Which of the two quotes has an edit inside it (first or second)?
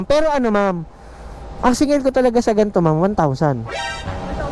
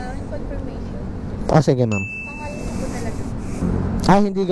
second